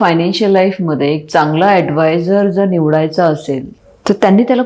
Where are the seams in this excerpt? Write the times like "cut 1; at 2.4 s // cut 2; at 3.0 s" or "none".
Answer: none